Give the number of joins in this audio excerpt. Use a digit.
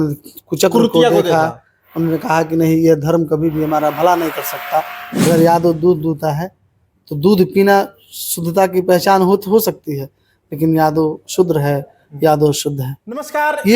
1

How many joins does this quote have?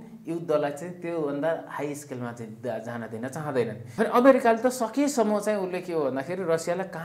1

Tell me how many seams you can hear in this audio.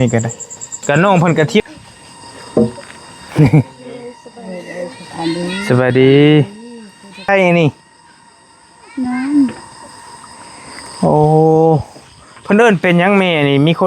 2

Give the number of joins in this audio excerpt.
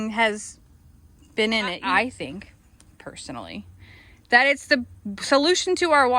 1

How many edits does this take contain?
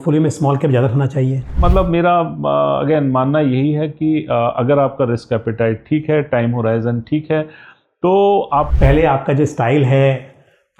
2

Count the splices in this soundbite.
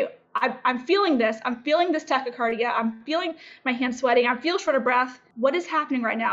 1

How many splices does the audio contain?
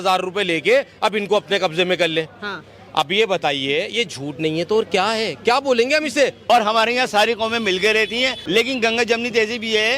2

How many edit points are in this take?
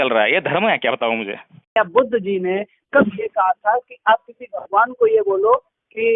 1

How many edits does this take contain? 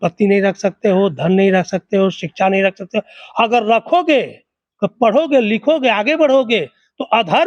0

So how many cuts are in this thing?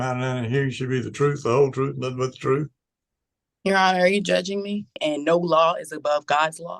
1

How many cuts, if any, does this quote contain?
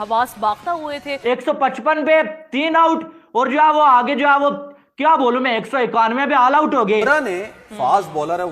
2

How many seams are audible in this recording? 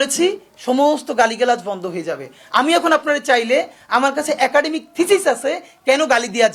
0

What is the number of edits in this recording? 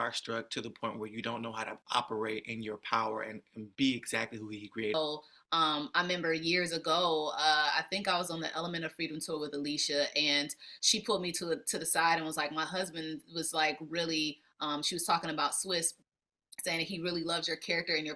1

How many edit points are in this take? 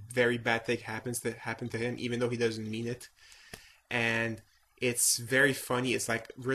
1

